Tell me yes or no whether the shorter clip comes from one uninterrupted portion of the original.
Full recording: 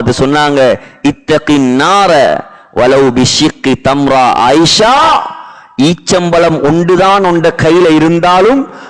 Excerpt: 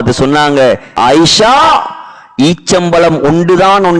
no